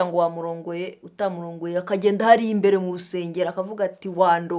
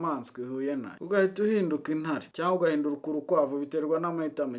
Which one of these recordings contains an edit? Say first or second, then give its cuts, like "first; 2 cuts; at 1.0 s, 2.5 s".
second; 2 cuts; at 0.9 s, 2.3 s